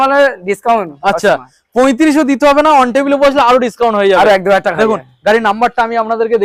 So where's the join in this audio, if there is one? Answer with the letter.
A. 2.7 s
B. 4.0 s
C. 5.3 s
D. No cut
D